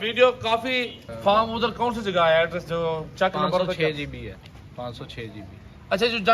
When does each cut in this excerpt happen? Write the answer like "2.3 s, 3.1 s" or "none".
1.0 s